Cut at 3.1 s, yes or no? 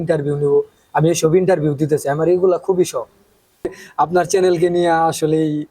yes